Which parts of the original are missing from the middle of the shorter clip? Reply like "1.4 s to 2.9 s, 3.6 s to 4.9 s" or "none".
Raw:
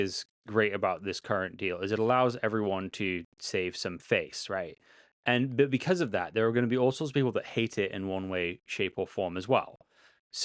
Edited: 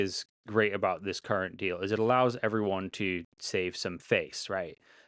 none